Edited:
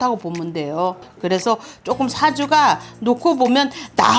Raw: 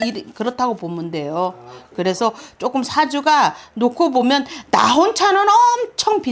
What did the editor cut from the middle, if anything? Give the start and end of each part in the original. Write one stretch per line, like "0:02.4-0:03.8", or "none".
0:01.6-0:01.8